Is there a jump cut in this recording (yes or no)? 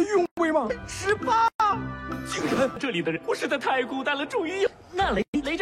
yes